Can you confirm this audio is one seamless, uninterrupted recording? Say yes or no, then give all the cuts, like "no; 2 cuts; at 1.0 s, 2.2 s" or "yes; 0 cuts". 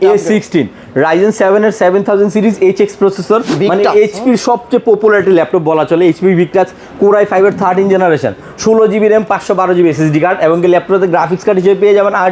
no; 1 cut; at 3.5 s